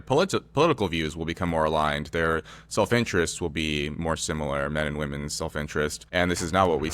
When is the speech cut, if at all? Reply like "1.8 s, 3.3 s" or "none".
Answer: 6.0 s